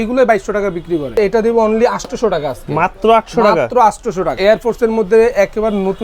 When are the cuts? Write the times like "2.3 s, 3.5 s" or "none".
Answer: 1.1 s, 4.3 s